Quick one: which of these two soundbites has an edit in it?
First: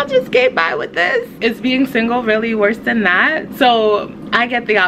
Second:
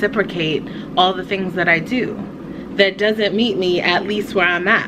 first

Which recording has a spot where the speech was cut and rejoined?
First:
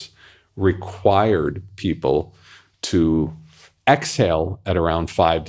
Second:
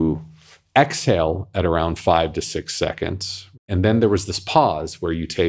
second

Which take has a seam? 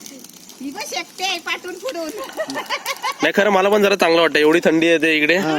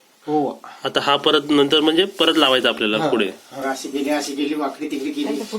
second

